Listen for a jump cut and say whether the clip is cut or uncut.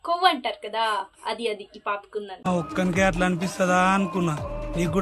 cut